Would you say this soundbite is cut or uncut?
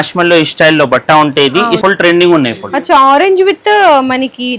cut